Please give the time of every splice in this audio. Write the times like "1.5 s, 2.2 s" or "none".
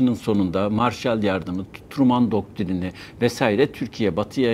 none